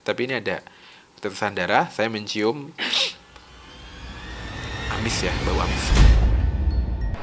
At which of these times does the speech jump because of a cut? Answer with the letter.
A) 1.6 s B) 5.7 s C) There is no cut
B